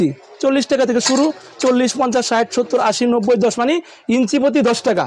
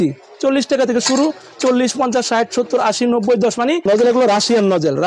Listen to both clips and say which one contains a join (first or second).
second